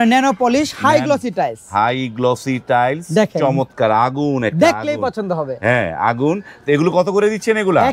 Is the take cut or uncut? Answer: uncut